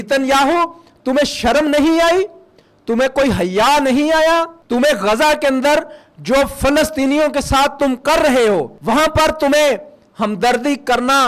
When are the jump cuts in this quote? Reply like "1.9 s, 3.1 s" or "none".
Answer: 4.6 s, 8.7 s